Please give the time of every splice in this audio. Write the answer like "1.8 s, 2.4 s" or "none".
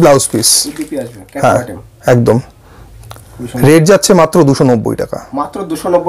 none